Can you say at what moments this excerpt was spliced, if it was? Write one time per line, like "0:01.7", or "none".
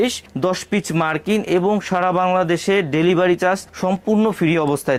none